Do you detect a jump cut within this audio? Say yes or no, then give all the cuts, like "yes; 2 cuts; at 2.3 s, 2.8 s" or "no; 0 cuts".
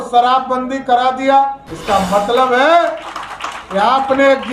yes; 1 cut; at 1.7 s